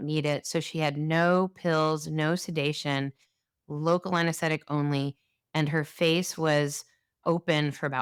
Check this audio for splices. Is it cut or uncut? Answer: uncut